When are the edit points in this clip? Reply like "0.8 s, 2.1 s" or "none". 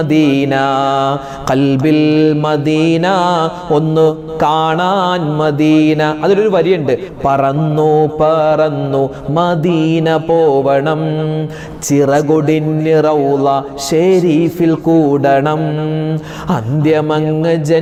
none